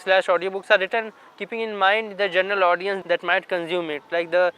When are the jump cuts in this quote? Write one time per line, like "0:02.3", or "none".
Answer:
0:03.0